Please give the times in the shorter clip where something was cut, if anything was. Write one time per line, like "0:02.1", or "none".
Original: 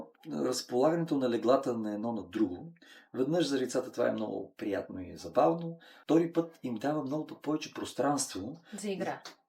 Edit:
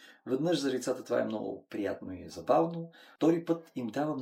none